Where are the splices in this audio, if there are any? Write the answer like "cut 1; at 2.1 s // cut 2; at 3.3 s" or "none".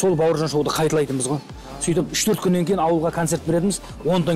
none